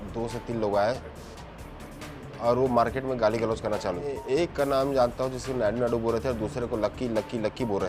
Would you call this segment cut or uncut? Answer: cut